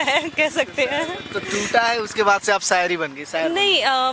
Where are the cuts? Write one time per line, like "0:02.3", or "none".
none